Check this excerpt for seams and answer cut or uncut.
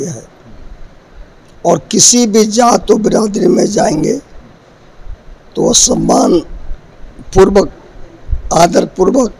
uncut